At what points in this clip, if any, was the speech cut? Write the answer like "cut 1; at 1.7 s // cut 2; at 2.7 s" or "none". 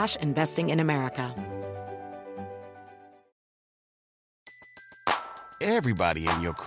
cut 1; at 1.3 s